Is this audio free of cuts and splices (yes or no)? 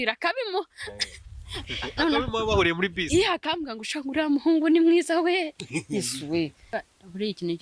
no